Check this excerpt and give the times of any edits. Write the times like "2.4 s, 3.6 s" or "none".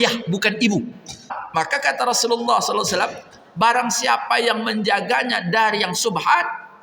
1.4 s